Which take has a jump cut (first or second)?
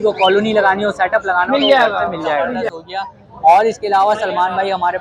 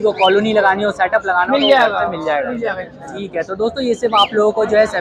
first